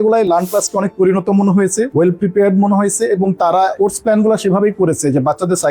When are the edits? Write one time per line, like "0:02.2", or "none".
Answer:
none